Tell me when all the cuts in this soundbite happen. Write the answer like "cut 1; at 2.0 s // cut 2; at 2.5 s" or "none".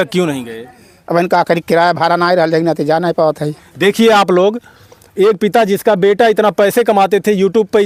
none